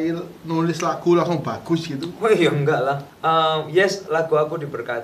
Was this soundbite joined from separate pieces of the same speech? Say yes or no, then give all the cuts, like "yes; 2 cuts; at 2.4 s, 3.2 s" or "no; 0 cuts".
yes; 1 cut; at 3.1 s